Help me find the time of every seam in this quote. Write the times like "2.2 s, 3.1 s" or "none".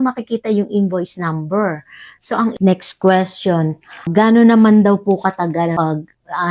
2.5 s, 4.1 s, 5.7 s